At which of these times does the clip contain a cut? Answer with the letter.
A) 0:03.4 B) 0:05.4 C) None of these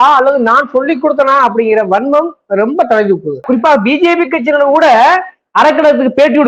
A